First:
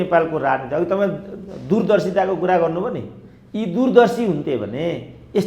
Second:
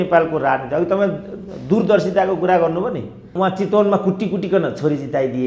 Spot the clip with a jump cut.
second; 1 cut; at 3.3 s

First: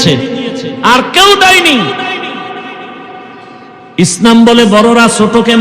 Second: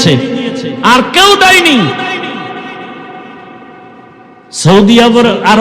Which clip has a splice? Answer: first; 1 cut; at 3.9 s

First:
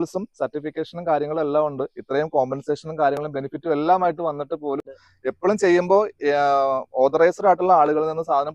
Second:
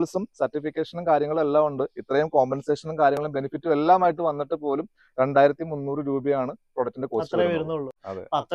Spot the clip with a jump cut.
first; 1 cut; at 5.0 s

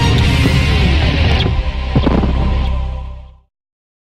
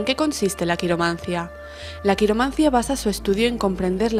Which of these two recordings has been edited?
first; 1 cut; at 1.4 s

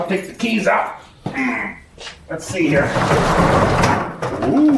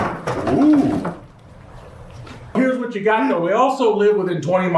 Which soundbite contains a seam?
second; 1 cut; at 2.6 s

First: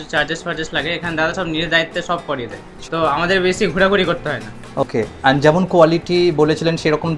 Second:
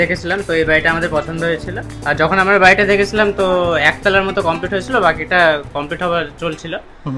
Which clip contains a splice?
first; 2 cuts; at 2.7 s, 4.8 s

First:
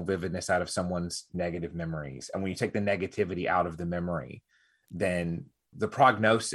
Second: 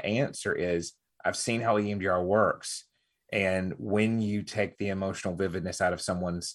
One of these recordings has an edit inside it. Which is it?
first; 1 cut; at 5.6 s

